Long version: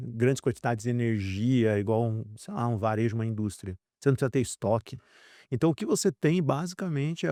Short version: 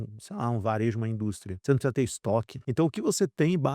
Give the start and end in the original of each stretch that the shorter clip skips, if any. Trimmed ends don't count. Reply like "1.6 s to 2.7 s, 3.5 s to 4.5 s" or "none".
3.7 s to 3.9 s, 5.0 s to 5.4 s